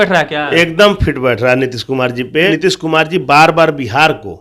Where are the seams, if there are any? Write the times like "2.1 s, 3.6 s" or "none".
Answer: 2.5 s